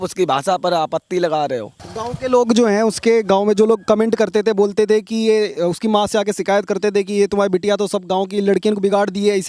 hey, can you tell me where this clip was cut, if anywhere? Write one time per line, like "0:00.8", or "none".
none

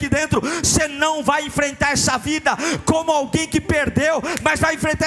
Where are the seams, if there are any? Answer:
none

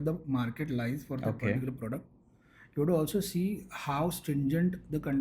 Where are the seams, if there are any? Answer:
none

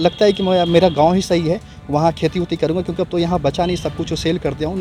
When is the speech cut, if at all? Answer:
none

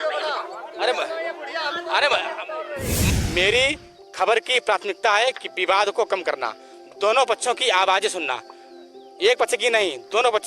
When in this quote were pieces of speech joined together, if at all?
0:03.1

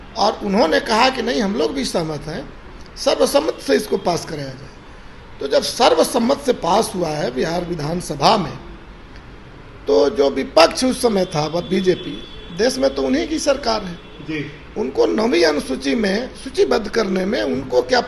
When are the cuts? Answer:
none

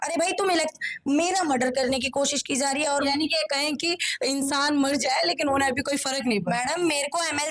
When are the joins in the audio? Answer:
none

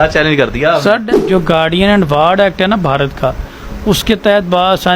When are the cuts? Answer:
0:00.9

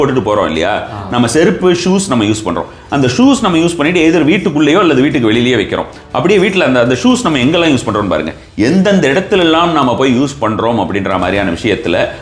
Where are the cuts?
none

